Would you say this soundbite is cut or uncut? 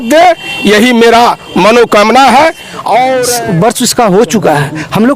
cut